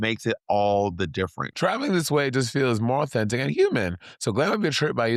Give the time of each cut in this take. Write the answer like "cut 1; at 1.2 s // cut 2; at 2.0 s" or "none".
cut 1; at 1.4 s